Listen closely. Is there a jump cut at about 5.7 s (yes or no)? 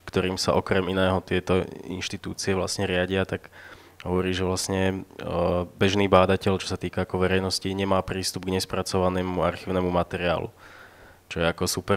no